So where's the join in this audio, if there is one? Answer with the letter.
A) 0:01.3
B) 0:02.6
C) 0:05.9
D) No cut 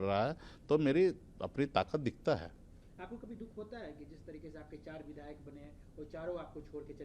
D